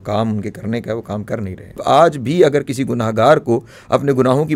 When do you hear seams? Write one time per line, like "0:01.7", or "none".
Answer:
0:01.8